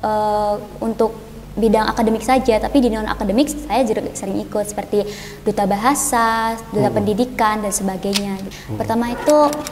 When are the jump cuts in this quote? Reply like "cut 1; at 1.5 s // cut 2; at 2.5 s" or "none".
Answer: cut 1; at 8.6 s